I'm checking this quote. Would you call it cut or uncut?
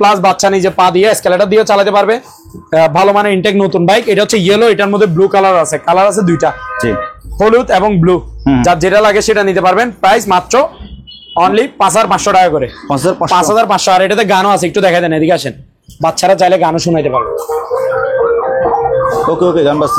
uncut